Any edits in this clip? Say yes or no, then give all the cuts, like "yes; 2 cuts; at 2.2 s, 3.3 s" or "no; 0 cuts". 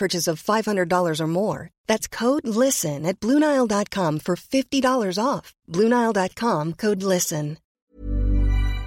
yes; 1 cut; at 7.6 s